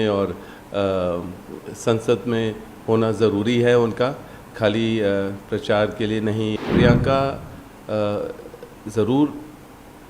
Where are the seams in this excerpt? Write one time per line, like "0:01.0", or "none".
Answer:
0:06.6